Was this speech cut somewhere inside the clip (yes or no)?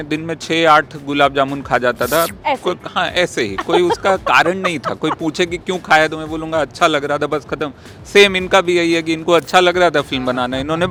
no